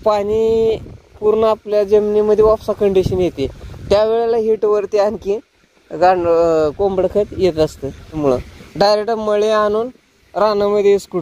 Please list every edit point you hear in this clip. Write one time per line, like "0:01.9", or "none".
0:08.2

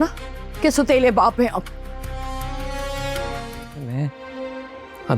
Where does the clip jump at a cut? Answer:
0:03.7

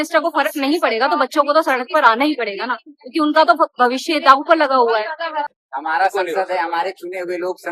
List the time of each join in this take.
0:05.5

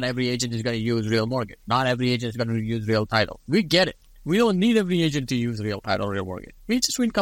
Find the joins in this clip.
0:04.0

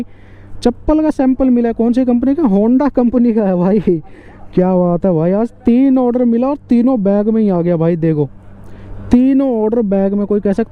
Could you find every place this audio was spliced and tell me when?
none

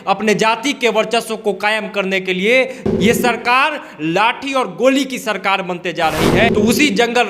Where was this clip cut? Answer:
0:02.8
0:06.5

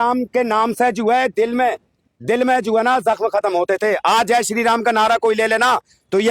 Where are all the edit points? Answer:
none

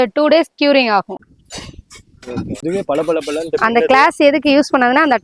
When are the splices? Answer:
0:01.2
0:02.6

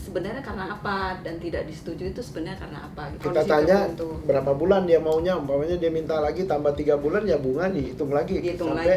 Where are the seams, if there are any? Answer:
0:03.2

